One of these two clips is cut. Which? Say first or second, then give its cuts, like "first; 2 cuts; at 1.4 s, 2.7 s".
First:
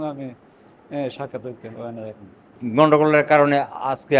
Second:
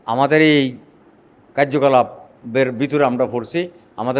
first; 1 cut; at 2.6 s